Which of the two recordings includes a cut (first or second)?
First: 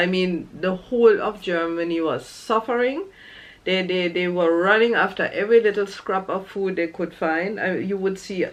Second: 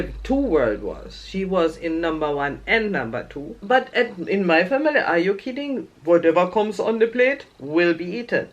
second